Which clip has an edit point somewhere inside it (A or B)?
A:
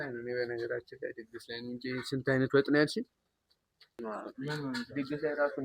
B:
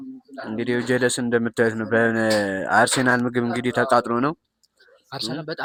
A